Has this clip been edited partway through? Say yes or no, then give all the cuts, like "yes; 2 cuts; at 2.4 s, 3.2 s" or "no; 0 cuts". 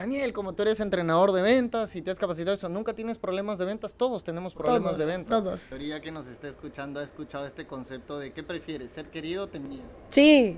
yes; 1 cut; at 5.7 s